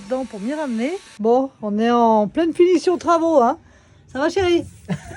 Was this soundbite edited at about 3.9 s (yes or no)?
no